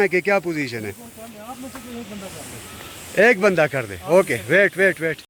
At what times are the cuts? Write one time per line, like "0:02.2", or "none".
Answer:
none